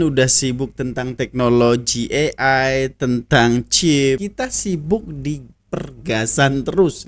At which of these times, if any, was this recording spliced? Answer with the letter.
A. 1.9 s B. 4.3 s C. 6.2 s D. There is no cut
B